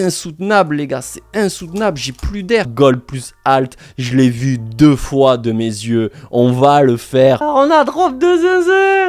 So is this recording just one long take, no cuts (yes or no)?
no